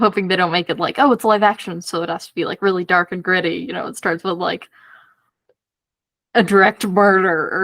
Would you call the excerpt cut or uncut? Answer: uncut